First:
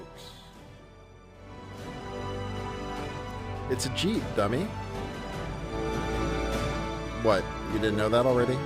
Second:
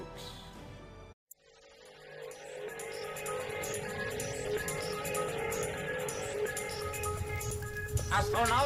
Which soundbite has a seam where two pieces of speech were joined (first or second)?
first